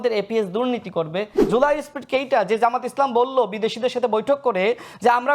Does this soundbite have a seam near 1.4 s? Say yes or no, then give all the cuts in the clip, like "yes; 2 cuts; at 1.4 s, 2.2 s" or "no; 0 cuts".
yes; 1 cut; at 1.4 s